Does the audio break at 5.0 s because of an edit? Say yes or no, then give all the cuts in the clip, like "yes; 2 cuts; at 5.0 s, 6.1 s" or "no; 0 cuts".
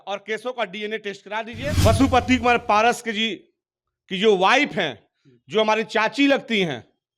no; 1 cut; at 1.8 s